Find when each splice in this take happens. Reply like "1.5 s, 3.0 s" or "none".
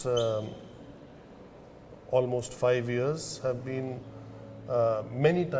none